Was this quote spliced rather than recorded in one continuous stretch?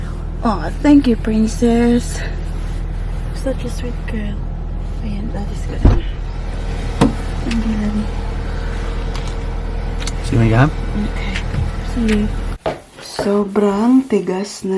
yes; 1 cut; at 12.5 s

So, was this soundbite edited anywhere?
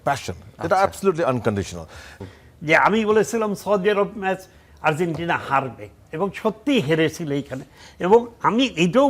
yes; 1 cut; at 2.1 s

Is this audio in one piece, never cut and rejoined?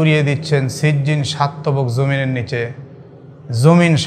yes; 0 cuts

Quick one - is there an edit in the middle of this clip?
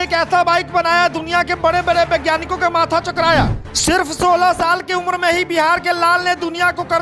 yes; 1 cut; at 3.8 s

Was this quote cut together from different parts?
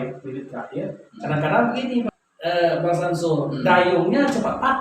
yes; 1 cut; at 2.1 s

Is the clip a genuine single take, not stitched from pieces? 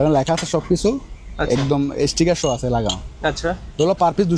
yes; 0 cuts

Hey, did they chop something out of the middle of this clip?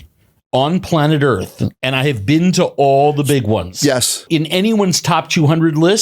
yes; 1 cut; at 4.2 s

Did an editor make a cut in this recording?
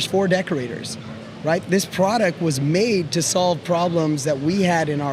no; 0 cuts

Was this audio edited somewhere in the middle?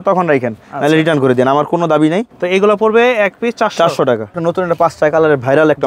yes; 2 cuts; at 2.3 s, 4.4 s

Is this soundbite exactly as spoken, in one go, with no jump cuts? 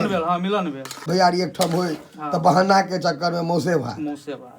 no; 1 cut; at 1.0 s

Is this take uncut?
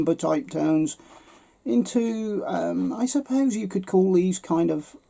yes; 0 cuts

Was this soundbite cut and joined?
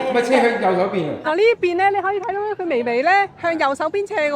yes; 1 cut; at 1.2 s

